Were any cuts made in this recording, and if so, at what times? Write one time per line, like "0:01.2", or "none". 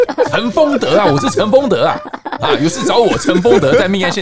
none